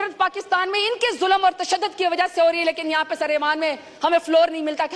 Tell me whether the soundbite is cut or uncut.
uncut